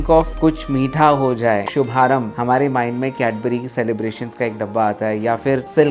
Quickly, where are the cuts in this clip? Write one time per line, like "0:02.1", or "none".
0:01.6